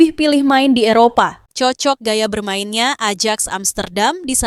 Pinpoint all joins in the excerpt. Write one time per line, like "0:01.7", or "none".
0:01.4